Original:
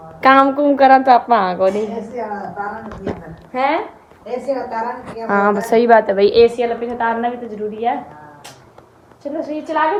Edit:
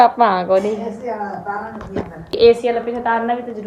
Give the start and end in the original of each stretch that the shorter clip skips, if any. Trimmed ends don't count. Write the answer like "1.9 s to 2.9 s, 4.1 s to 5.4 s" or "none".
3.5 s to 6.3 s